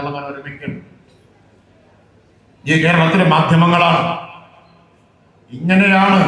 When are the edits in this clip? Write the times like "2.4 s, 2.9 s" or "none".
none

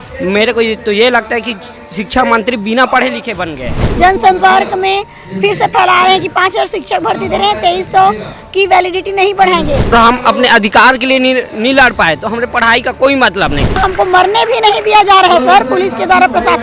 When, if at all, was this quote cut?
3.8 s, 9.9 s, 13.8 s

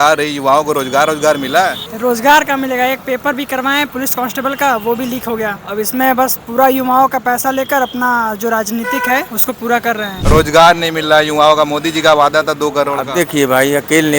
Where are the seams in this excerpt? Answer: 1.9 s, 3.9 s, 5.6 s, 9.3 s, 10.1 s

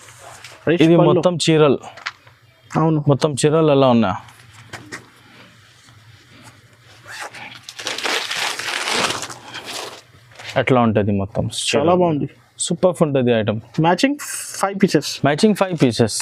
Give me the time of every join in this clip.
none

